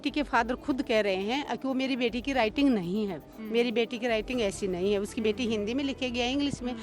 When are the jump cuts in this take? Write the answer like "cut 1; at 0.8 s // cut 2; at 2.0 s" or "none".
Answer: none